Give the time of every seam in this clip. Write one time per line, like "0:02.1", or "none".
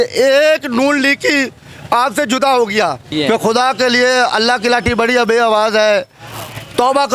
0:03.0